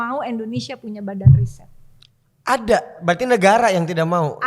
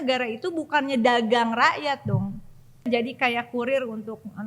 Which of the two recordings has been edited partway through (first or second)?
second